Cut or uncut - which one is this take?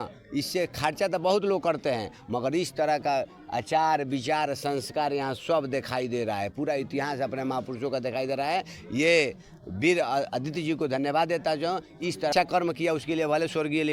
cut